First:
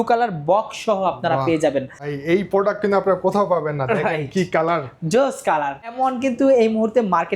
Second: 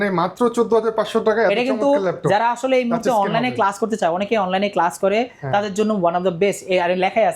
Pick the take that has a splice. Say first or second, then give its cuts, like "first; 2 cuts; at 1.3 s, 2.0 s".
first; 2 cuts; at 2.1 s, 5.9 s